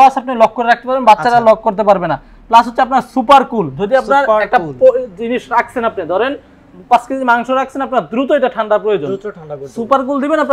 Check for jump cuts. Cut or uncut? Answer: uncut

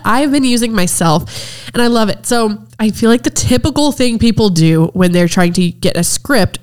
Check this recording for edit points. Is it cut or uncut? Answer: cut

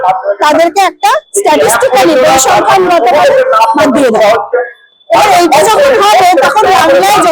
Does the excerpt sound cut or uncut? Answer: uncut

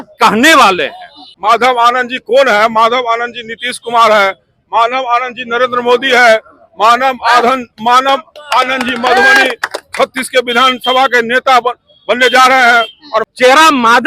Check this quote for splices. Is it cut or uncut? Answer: cut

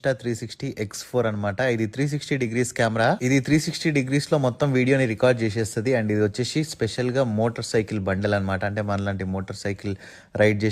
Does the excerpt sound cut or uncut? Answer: uncut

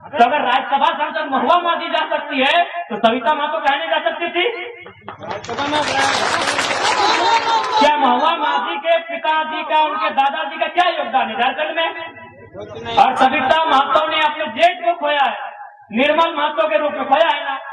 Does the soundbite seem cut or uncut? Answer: uncut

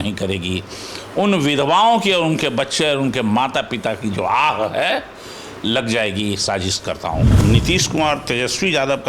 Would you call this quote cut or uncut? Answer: cut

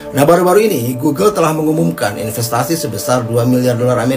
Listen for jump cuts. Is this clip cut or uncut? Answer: uncut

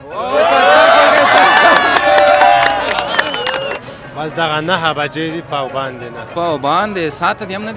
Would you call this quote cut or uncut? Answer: cut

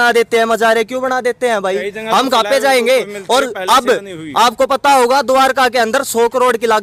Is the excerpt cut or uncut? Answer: uncut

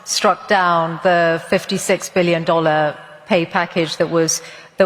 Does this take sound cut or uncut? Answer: uncut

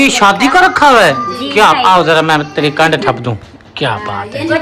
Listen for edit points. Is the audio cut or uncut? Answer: uncut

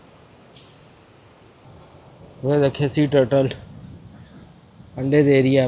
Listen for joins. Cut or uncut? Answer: cut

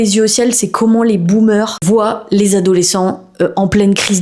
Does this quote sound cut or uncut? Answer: cut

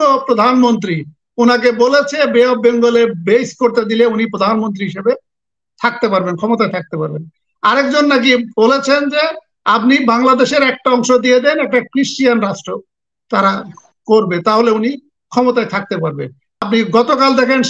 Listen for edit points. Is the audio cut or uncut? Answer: cut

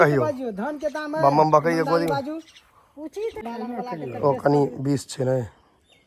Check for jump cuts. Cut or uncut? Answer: cut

